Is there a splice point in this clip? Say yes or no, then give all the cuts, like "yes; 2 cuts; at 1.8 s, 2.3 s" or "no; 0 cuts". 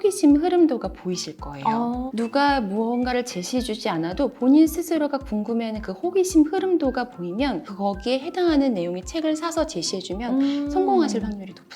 yes; 2 cuts; at 2.1 s, 7.7 s